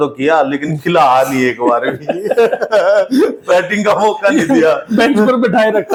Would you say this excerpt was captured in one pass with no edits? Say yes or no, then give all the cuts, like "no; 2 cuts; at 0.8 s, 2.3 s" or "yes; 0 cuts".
yes; 0 cuts